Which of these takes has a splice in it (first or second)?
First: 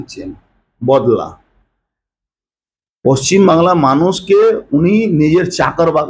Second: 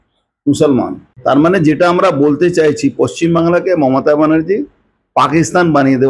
second